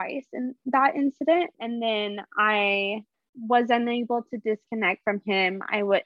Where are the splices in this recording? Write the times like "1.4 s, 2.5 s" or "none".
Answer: 1.6 s